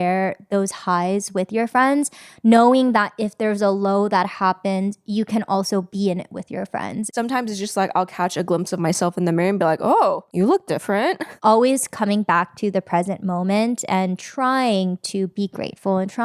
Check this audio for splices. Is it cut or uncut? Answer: cut